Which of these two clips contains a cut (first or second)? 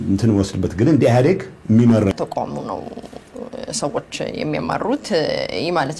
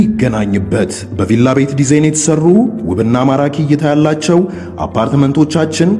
first